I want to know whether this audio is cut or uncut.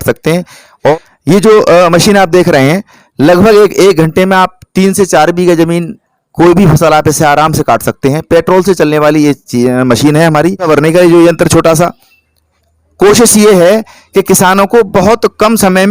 cut